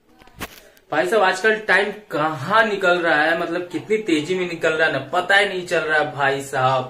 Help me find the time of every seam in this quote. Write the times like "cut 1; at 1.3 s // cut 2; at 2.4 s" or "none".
none